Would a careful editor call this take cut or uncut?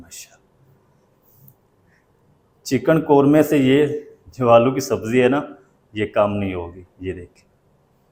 uncut